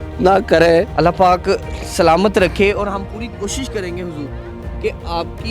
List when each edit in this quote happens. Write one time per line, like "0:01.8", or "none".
0:00.9